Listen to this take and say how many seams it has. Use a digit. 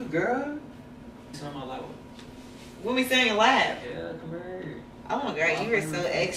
1